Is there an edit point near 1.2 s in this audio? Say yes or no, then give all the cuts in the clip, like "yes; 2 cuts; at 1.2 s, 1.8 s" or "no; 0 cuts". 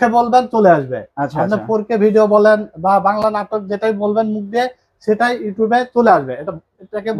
no; 0 cuts